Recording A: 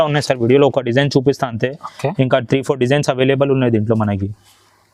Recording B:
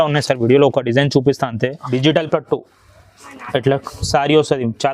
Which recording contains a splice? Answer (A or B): B